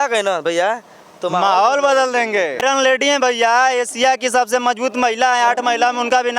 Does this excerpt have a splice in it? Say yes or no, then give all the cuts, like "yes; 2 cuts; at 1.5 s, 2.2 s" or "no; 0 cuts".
yes; 1 cut; at 2.6 s